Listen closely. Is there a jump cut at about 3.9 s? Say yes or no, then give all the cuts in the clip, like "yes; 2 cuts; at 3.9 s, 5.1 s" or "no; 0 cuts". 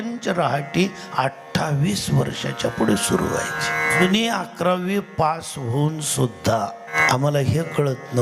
yes; 2 cuts; at 3.9 s, 7.0 s